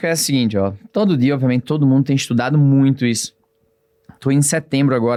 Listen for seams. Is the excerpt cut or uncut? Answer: uncut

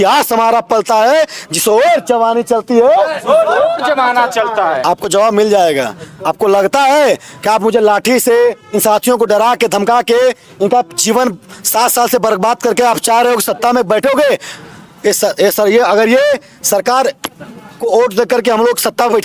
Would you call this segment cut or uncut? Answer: uncut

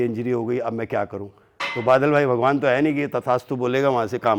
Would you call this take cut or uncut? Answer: uncut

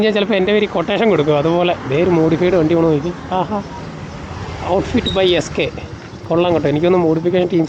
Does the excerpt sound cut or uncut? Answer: uncut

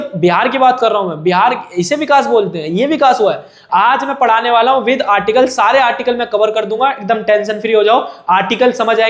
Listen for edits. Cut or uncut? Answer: cut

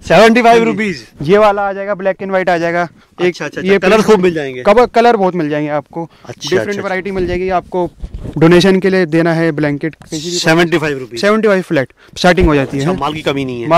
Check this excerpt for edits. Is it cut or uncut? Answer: uncut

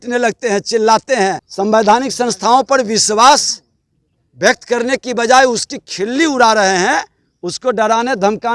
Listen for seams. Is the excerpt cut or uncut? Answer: cut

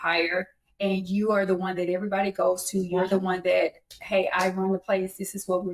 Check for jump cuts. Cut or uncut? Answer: uncut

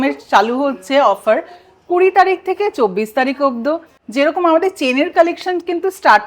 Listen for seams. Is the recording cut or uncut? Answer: cut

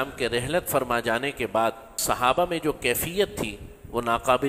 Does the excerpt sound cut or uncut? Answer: cut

